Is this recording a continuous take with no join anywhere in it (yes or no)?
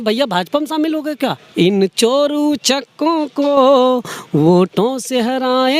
no